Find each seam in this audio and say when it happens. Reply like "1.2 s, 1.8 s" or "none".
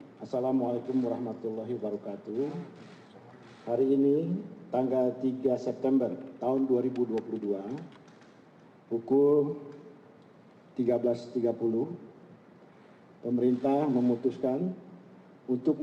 2.8 s

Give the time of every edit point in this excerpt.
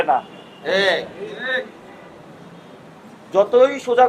none

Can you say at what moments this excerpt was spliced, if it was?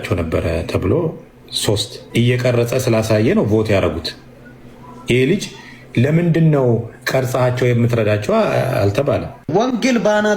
2.0 s, 9.4 s

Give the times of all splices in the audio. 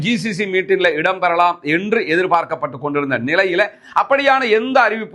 none

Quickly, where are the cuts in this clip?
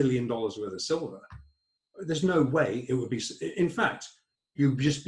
none

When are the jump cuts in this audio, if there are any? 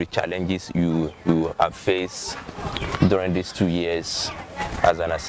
none

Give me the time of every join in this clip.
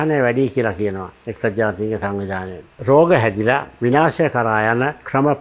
2.8 s, 3.7 s

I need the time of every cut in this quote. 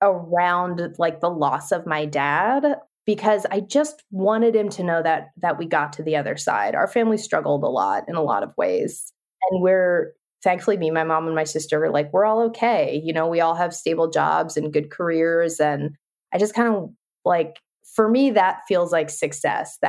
none

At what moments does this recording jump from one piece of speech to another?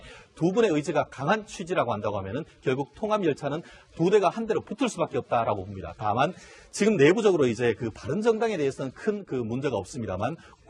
7.9 s

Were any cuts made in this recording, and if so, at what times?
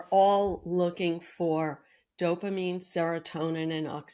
none

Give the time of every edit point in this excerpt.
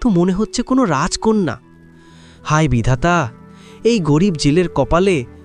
none

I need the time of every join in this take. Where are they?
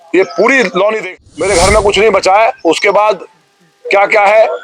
1.0 s

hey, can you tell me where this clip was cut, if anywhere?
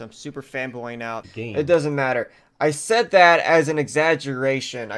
1.3 s

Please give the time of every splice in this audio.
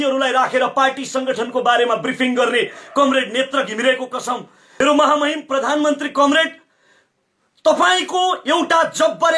4.8 s

